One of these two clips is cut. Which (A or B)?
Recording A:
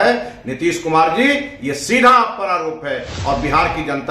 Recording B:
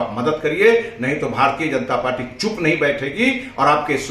A